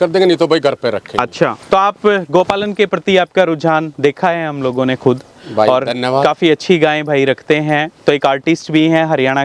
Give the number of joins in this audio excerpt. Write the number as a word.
zero